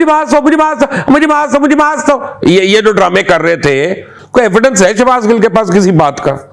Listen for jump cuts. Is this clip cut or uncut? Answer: cut